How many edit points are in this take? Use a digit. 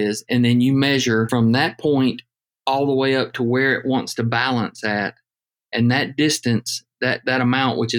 1